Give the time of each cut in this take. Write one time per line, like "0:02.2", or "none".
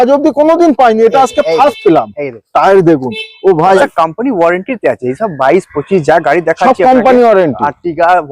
0:03.8